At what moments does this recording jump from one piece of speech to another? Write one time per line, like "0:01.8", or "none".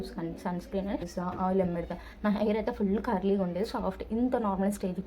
0:01.1

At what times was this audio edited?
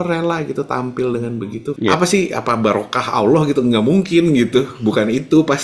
0:01.7

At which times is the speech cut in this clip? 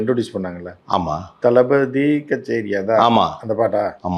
none

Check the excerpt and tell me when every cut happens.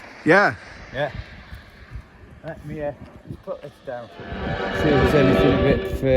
0:04.5

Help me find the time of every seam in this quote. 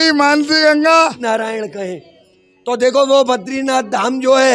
0:01.2

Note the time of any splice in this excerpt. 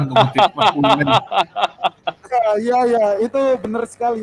none

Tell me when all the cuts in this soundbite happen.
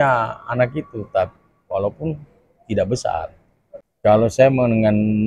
none

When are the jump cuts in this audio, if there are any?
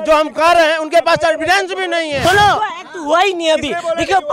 0:02.2

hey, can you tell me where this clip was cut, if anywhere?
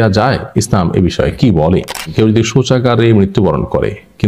0:02.1

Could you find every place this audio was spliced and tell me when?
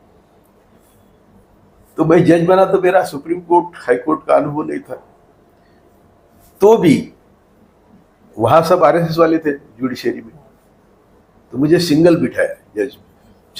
none

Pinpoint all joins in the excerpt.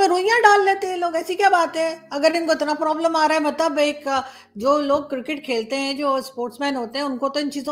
none

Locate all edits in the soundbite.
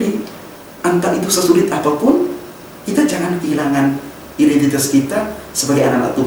none

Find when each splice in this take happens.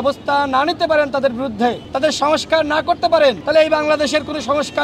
0:01.9
0:03.4

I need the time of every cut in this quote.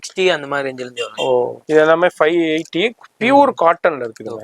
0:01.6

